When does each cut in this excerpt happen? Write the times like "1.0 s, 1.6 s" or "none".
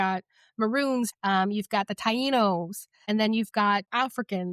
1.1 s, 2.9 s